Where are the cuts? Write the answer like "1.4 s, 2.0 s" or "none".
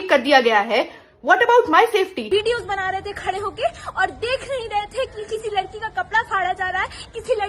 2.2 s